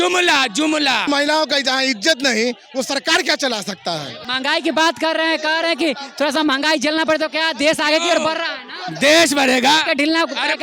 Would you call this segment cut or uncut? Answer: cut